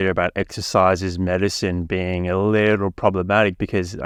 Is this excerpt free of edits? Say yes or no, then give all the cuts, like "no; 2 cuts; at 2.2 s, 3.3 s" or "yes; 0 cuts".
yes; 0 cuts